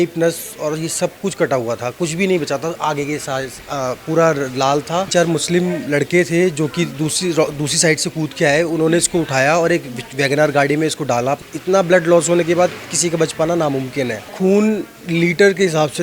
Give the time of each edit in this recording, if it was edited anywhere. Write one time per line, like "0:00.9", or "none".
0:05.1
0:11.4
0:14.3